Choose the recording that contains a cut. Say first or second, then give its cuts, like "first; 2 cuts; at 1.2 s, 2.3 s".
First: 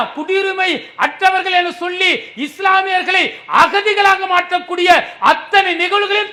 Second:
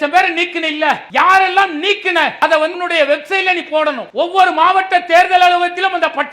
second; 3 cuts; at 1.0 s, 2.5 s, 4.0 s